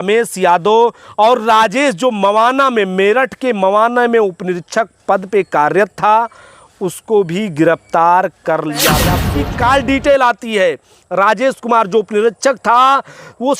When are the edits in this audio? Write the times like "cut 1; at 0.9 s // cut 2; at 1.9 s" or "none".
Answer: cut 1; at 9.2 s